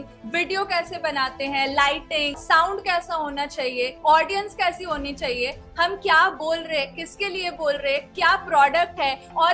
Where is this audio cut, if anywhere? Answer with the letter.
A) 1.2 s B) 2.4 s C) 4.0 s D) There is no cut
B